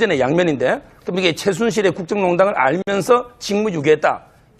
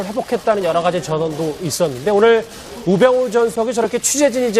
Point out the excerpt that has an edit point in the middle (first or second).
second